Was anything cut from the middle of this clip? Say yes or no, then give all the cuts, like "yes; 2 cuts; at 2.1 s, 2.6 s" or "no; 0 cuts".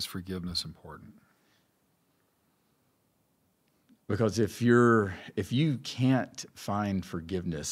no; 0 cuts